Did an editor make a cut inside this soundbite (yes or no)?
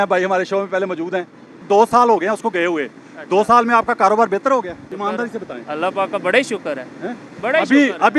yes